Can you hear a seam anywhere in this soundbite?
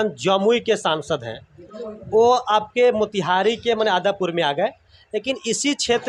no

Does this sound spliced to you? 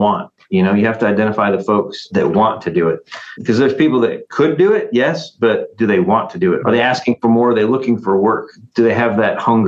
yes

